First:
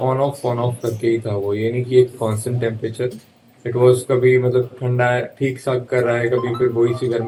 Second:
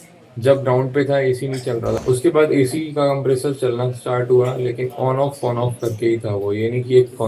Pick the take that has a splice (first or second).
second